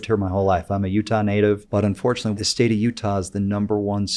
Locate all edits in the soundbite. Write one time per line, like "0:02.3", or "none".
0:02.2